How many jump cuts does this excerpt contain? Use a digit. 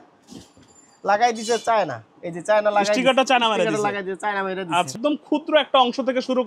1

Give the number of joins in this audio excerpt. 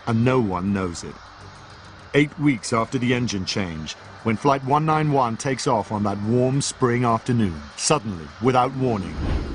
1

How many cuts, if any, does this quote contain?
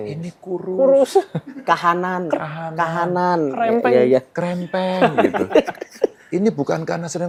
0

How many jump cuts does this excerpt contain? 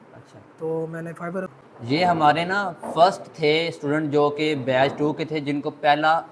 1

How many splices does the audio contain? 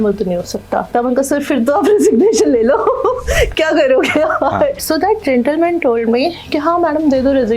2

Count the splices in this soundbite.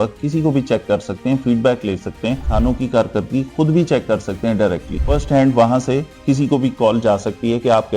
2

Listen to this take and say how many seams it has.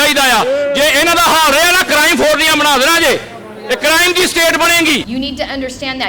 1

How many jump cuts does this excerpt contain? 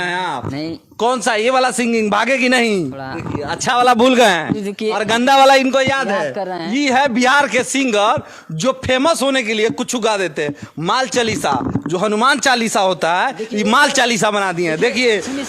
1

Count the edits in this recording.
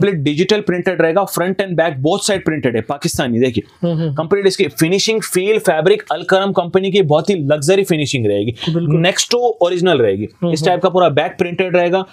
0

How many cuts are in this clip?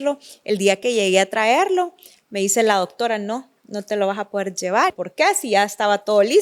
1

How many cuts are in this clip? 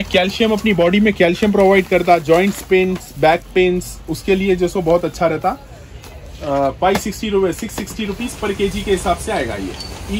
0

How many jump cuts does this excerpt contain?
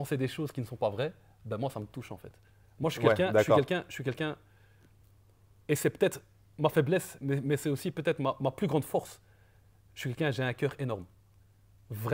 0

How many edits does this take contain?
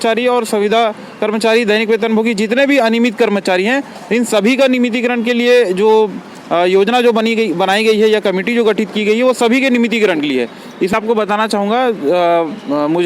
1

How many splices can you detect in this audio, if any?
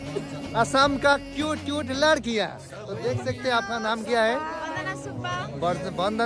0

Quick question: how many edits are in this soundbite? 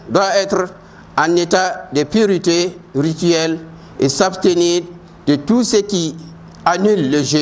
0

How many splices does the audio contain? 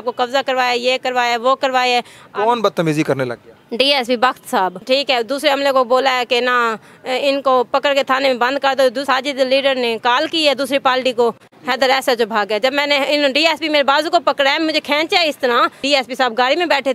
4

